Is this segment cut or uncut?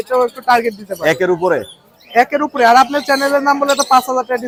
uncut